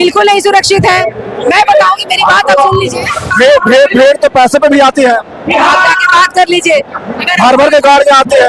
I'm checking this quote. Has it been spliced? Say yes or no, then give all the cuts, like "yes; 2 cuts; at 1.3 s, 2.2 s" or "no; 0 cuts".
yes; 1 cut; at 3.3 s